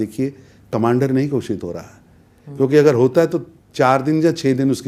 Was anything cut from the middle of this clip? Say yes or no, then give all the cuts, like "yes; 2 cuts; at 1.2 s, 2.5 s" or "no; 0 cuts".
no; 0 cuts